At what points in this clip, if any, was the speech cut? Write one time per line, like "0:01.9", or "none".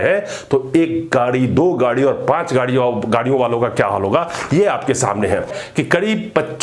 0:05.6